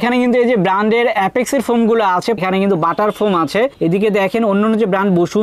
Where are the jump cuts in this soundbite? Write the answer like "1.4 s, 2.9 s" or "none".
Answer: 2.4 s